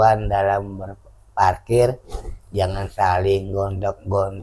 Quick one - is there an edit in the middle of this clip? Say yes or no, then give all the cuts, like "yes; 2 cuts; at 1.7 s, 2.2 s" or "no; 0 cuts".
no; 0 cuts